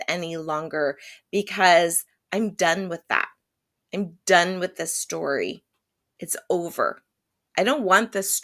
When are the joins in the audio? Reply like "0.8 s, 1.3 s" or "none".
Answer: none